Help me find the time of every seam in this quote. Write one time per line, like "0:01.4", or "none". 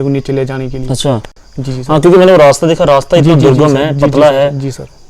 none